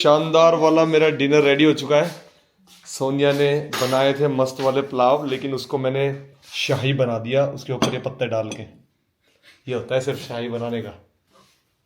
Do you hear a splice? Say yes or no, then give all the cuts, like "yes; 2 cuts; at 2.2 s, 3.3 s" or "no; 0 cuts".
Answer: no; 0 cuts